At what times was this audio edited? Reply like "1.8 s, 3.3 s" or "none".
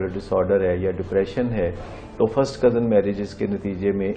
none